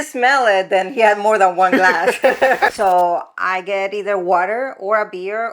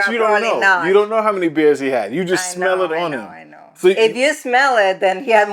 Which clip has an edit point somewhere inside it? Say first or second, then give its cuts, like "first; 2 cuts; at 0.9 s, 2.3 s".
first; 1 cut; at 2.7 s